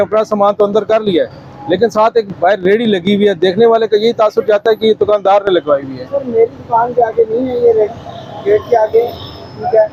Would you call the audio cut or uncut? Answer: uncut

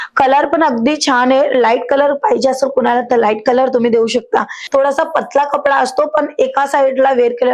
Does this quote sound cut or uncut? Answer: cut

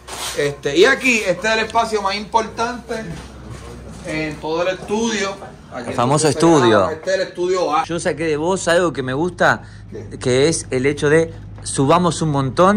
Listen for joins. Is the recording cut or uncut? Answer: cut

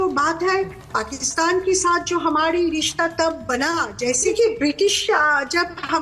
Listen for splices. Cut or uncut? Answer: cut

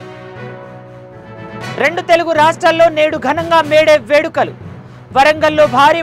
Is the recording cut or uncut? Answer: uncut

